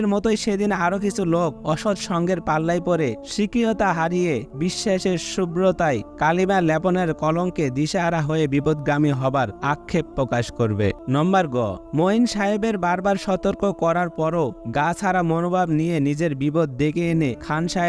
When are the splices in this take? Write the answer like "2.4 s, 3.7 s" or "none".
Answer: 11.0 s